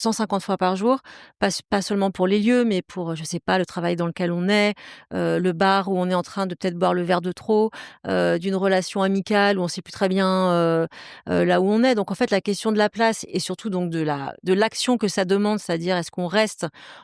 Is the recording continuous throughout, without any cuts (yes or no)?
yes